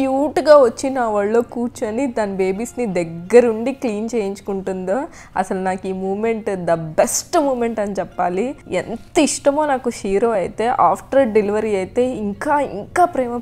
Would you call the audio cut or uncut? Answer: uncut